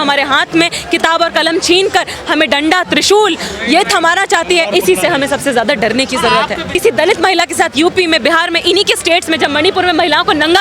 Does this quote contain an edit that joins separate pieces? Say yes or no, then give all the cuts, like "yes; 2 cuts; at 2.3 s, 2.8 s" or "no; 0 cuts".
yes; 1 cut; at 6.7 s